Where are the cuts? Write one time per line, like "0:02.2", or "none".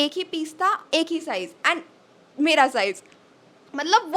none